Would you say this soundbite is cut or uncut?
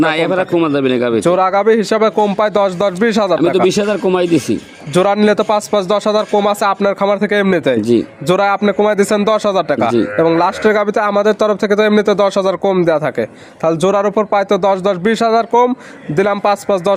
uncut